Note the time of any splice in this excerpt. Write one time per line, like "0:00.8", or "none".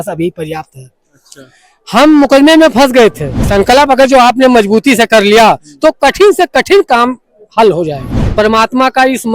0:03.5
0:08.2